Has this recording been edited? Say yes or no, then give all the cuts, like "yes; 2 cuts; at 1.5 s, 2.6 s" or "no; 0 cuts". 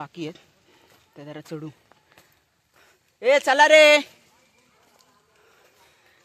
no; 0 cuts